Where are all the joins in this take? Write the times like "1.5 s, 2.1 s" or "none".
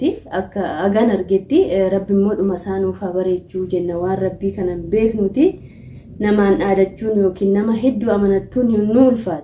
none